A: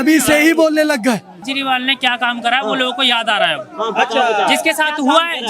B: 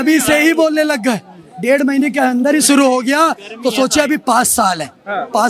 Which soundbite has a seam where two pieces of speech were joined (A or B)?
A